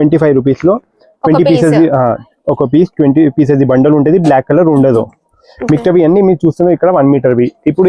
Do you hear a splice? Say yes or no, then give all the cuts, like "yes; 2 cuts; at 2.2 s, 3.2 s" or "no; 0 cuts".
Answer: no; 0 cuts